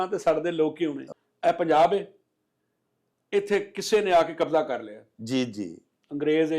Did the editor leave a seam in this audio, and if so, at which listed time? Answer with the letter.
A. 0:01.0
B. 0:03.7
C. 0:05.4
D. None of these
A